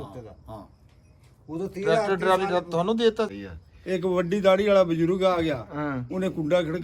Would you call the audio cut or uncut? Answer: cut